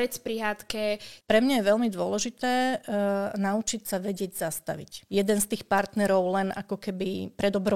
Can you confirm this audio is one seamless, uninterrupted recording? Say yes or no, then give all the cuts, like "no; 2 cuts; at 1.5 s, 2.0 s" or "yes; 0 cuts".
no; 2 cuts; at 1.1 s, 5.1 s